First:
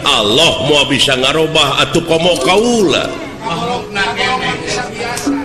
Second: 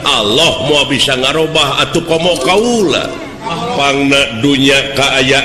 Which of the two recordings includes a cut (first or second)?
second